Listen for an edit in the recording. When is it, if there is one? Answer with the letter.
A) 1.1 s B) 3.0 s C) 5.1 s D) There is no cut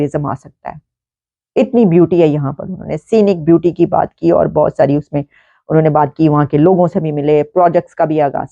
D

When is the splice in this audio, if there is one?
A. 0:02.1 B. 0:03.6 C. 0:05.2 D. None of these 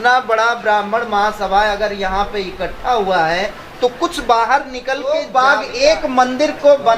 C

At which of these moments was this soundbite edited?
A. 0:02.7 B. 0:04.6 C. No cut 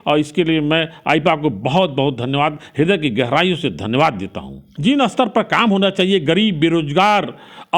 B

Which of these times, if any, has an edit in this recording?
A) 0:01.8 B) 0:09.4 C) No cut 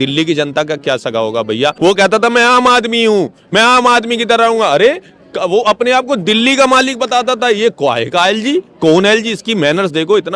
A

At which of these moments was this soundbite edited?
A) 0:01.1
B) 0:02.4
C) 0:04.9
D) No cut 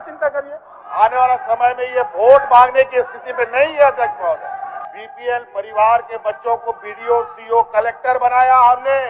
C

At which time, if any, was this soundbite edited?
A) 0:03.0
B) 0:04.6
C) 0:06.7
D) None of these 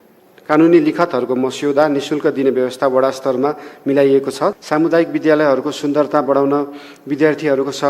B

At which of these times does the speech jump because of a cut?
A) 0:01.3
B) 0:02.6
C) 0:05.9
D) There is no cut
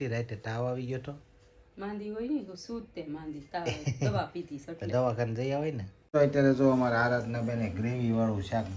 C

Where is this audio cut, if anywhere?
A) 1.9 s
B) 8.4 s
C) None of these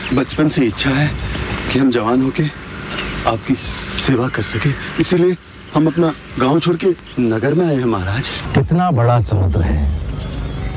B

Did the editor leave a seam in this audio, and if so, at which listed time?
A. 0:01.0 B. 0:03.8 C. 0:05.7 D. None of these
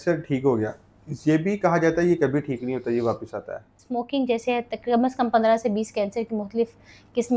B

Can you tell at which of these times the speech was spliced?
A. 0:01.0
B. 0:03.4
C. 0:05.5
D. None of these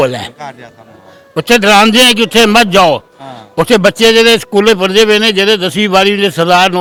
D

